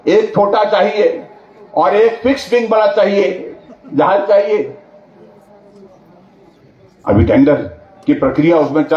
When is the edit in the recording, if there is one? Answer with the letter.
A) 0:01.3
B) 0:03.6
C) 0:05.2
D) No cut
D